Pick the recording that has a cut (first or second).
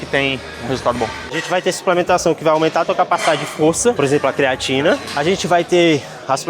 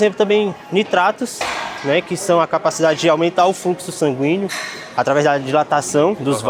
first